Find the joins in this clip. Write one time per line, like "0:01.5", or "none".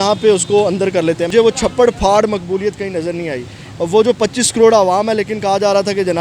0:01.3